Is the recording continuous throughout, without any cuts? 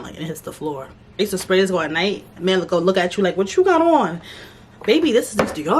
no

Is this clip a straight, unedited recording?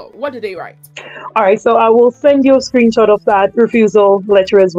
yes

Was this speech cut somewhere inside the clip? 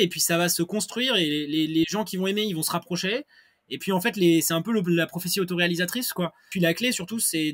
yes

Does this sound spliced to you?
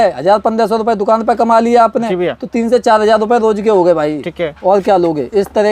no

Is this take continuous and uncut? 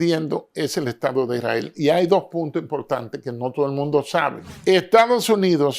no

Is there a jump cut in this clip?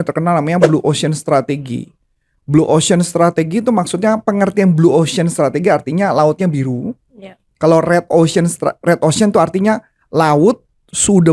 no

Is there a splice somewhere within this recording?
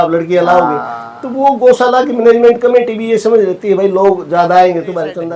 no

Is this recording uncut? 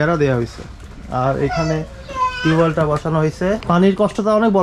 no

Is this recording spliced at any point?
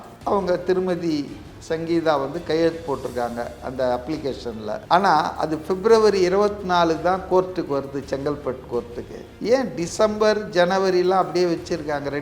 yes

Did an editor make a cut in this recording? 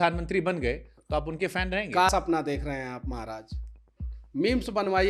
no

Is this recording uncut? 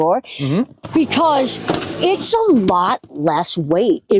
yes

